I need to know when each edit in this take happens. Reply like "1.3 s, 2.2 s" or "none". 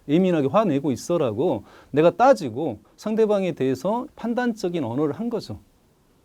4.1 s